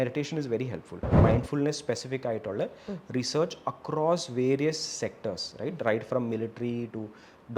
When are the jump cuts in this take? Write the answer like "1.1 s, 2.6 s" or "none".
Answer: 1.1 s

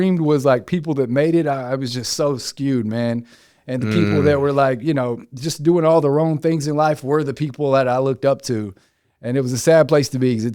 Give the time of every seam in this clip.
none

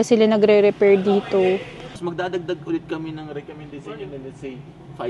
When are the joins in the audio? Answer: 2.0 s

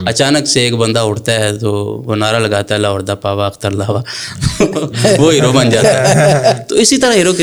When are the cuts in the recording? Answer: none

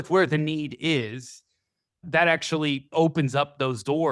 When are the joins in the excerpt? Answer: 2.9 s

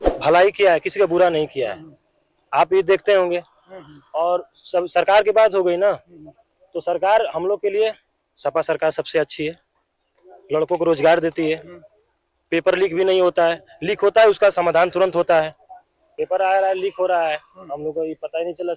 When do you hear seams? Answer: 15.8 s

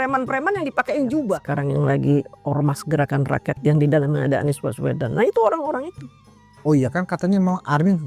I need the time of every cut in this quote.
1.5 s

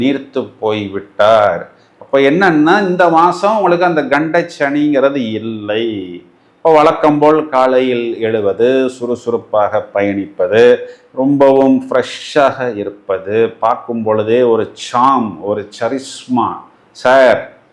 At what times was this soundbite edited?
none

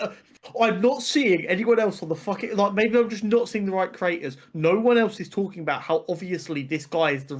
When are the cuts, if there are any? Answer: none

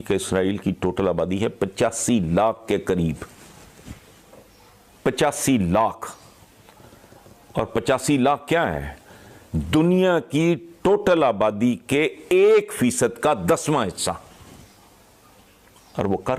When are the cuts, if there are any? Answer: none

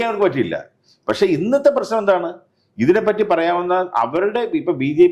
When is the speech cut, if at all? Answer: none

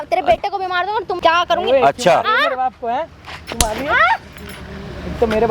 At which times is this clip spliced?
1.1 s

